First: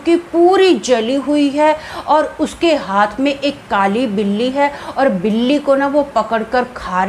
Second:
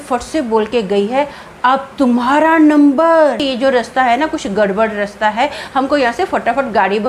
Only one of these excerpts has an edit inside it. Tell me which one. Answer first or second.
second